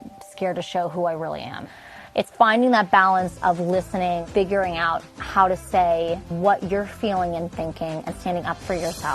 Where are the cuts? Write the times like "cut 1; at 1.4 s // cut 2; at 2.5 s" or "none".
cut 1; at 1.6 s // cut 2; at 4.2 s // cut 3; at 6.3 s